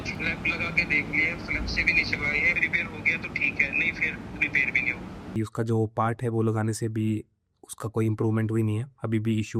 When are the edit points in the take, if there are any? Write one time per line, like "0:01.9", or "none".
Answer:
0:02.6
0:05.2